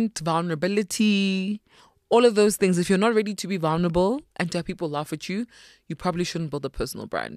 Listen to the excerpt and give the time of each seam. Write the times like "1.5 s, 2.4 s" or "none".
none

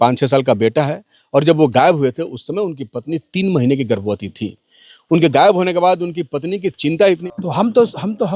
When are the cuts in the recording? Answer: 7.2 s

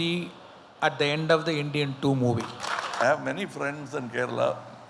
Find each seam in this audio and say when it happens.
2.9 s

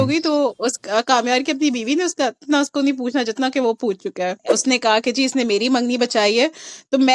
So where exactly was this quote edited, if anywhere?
4.4 s

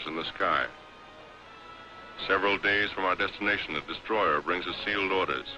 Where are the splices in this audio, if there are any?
2.2 s

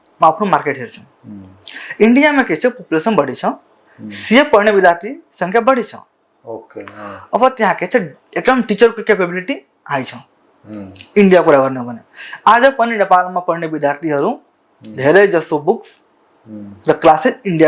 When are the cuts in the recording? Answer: none

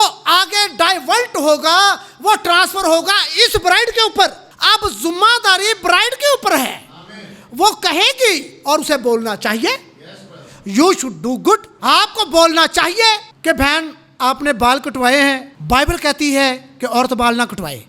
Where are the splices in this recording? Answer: 4.5 s, 11.7 s, 13.3 s, 15.5 s

